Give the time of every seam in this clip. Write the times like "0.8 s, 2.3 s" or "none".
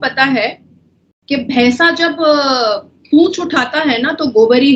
none